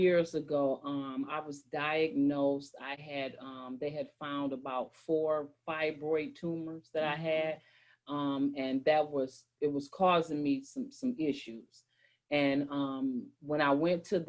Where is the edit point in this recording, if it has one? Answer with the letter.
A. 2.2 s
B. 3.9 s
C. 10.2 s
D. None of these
D